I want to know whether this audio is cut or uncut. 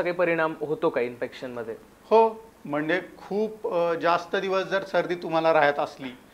uncut